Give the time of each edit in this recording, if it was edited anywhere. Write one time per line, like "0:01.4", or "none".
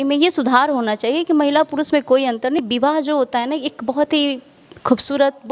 0:02.6